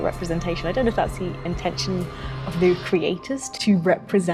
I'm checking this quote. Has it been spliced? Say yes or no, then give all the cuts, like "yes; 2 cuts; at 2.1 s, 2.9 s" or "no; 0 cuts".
no; 0 cuts